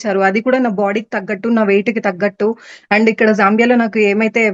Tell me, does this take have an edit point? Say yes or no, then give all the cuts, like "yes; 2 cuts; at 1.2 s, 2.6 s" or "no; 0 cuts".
no; 0 cuts